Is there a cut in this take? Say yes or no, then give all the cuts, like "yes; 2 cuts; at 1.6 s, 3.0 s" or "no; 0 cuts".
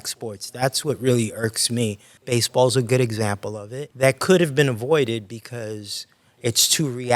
yes; 2 cuts; at 2.1 s, 3.8 s